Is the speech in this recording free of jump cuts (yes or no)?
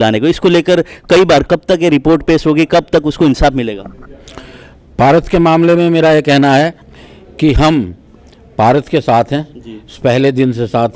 yes